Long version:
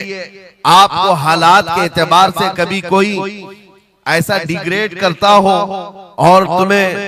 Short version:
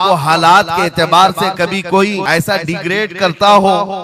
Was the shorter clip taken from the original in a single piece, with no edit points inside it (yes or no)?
no